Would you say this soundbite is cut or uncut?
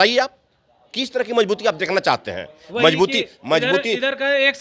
uncut